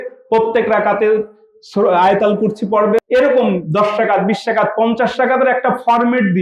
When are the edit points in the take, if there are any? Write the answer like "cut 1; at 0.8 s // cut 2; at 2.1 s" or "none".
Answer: cut 1; at 3.0 s